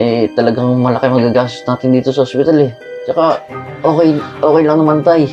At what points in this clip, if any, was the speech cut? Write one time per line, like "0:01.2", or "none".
none